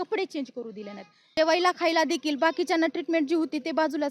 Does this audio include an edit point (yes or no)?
yes